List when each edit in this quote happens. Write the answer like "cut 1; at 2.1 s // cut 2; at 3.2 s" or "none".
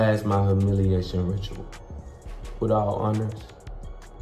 none